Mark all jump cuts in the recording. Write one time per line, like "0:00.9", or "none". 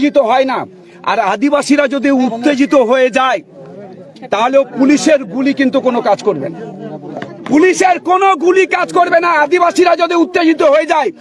none